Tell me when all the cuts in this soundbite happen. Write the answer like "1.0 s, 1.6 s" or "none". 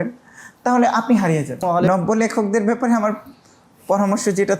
1.6 s